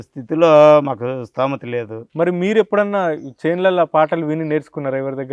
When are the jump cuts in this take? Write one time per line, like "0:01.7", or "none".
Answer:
0:02.0